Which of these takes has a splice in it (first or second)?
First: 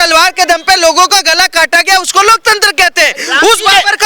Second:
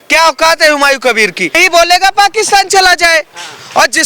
second